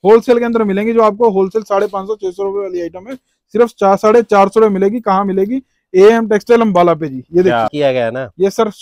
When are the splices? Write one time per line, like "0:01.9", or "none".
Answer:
0:07.7